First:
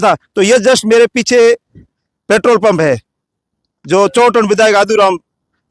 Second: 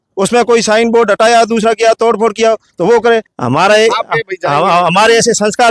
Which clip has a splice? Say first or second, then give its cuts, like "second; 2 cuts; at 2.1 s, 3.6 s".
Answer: second; 1 cut; at 3.3 s